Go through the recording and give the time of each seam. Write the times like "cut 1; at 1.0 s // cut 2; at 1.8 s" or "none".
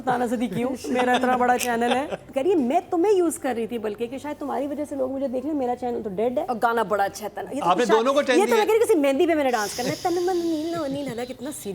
cut 1; at 2.2 s // cut 2; at 6.5 s